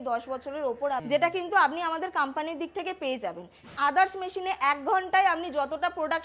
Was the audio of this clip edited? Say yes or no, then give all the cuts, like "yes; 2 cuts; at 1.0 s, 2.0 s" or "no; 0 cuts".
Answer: yes; 2 cuts; at 1.0 s, 3.7 s